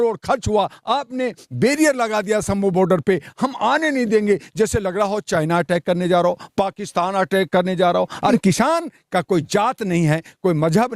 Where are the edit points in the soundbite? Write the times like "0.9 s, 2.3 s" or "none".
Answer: 8.3 s

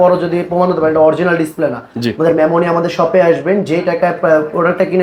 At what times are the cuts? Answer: none

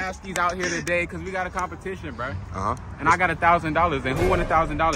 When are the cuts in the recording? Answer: none

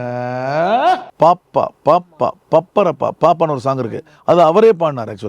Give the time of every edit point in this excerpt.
1.1 s

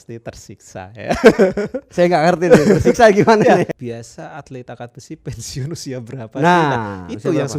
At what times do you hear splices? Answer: 3.8 s

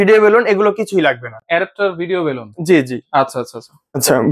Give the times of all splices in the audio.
none

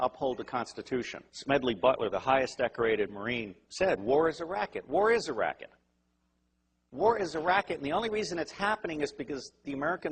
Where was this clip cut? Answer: none

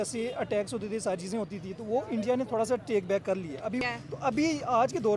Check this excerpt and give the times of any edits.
3.8 s

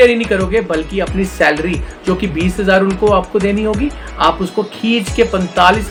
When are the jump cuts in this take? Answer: none

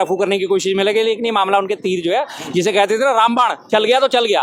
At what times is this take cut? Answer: none

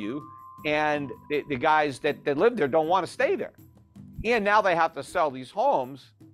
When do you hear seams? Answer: 1.1 s

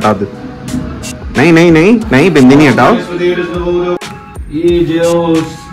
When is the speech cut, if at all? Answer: 4.0 s

